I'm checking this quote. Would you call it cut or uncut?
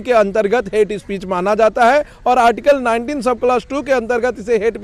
uncut